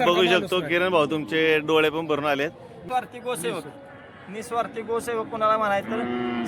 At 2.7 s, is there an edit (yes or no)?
yes